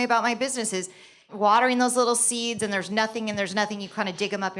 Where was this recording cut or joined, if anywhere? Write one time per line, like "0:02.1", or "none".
0:01.3